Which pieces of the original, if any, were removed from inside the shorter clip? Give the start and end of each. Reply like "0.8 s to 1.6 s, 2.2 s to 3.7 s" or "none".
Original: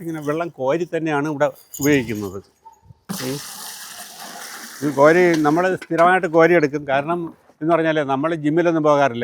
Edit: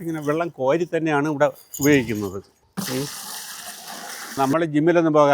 2.6 s to 2.9 s, 4.7 s to 8.1 s